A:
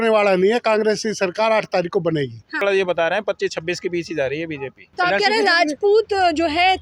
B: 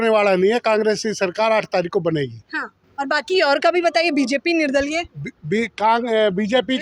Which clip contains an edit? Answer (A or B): A